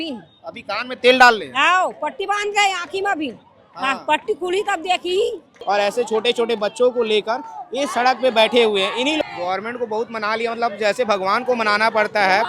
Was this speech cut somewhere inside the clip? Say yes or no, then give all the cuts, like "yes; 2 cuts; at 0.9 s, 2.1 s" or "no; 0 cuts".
yes; 2 cuts; at 5.5 s, 9.2 s